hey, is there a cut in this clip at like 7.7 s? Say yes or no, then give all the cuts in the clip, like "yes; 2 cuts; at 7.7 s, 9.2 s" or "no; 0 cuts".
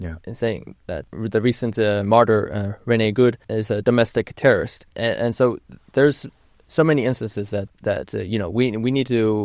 yes; 4 cuts; at 1.1 s, 3.5 s, 4.8 s, 7.7 s